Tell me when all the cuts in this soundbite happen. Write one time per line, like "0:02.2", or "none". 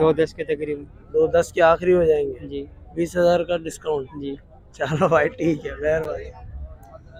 none